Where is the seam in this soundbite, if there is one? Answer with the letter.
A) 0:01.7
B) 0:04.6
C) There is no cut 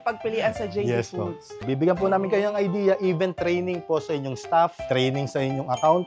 A